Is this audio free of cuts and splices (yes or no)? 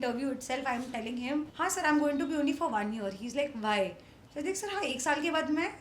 no